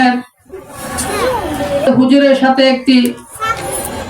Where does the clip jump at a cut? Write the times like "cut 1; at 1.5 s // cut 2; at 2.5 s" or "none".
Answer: cut 1; at 1.9 s